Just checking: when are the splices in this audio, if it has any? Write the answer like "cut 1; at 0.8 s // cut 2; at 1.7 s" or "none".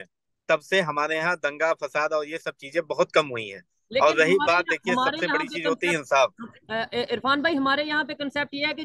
cut 1; at 4.3 s